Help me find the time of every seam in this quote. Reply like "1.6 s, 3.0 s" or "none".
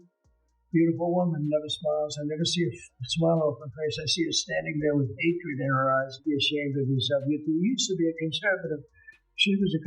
6.1 s